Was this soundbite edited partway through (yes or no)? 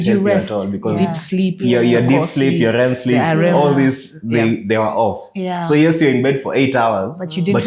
no